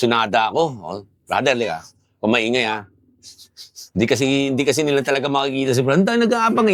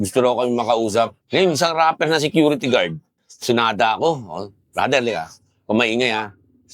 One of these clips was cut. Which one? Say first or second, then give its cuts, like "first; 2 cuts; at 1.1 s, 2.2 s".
second; 1 cut; at 1.2 s